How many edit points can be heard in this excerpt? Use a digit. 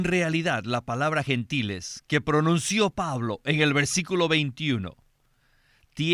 0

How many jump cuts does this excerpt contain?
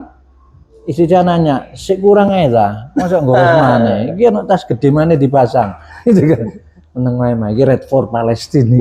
0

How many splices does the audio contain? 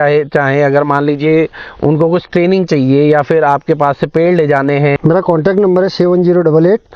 1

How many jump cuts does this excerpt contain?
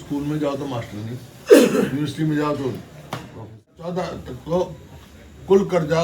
1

